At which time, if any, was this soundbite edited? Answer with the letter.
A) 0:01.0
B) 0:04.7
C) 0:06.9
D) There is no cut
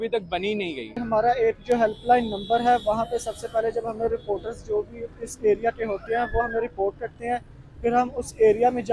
A